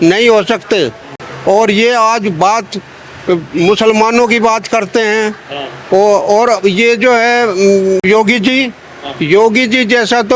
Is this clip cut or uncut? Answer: uncut